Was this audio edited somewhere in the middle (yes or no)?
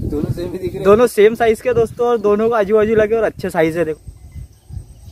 yes